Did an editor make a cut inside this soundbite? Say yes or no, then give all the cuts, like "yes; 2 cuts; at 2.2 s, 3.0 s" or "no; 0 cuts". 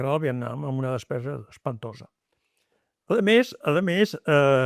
no; 0 cuts